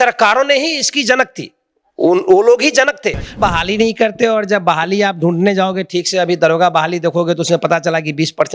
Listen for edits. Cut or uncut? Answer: cut